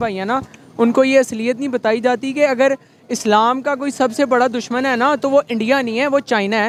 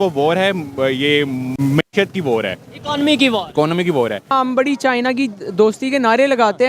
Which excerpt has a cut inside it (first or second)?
second